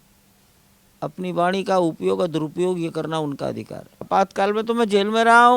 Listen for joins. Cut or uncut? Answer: cut